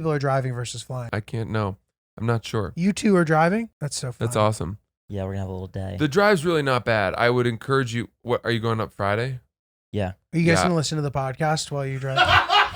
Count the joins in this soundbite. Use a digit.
2